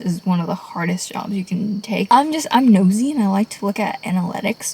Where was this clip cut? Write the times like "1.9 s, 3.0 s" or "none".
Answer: 2.1 s